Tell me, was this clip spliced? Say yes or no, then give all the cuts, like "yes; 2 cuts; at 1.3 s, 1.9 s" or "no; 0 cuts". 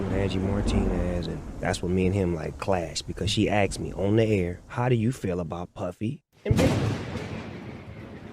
yes; 1 cut; at 6.5 s